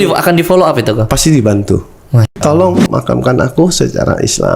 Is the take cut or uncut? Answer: cut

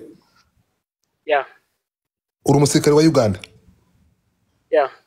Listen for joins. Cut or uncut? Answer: uncut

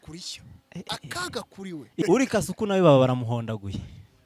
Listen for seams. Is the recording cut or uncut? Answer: cut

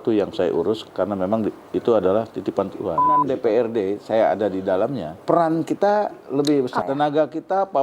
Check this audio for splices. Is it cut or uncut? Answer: cut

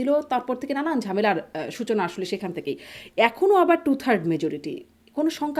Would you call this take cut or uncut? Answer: uncut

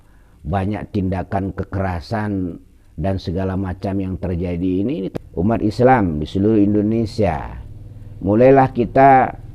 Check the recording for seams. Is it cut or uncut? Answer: cut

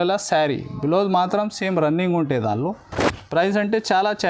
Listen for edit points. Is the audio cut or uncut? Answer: uncut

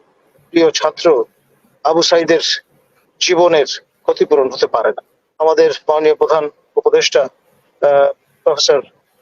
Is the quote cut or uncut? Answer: cut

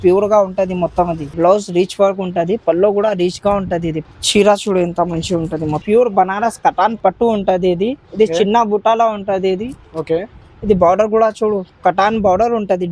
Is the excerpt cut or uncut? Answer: cut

